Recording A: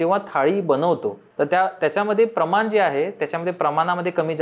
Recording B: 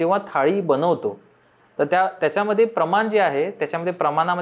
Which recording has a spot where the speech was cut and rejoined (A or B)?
A